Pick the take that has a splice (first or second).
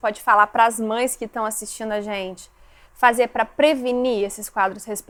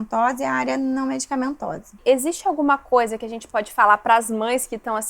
second